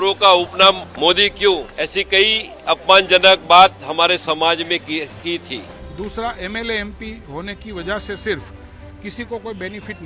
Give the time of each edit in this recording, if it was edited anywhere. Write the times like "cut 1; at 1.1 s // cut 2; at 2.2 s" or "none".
cut 1; at 0.9 s // cut 2; at 1.7 s // cut 3; at 5.8 s